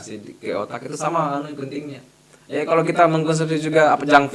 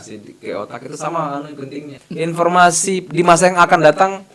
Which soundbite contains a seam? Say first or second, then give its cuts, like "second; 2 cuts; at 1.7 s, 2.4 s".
second; 1 cut; at 2.0 s